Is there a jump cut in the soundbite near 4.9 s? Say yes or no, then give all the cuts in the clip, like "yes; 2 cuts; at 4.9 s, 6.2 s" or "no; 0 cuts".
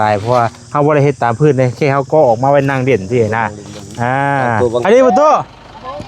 yes; 1 cut; at 4.9 s